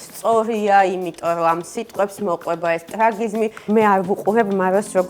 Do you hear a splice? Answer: yes; 1 cut; at 3.6 s

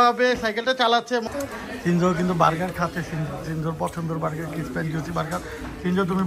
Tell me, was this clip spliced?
yes; 1 cut; at 1.3 s

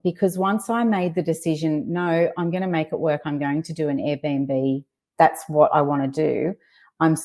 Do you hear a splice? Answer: no; 0 cuts

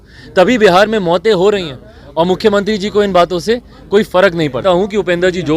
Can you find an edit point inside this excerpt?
yes; 1 cut; at 4.6 s

